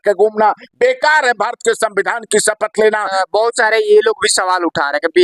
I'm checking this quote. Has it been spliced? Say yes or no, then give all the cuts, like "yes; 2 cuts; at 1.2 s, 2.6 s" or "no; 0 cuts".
yes; 1 cut; at 3.1 s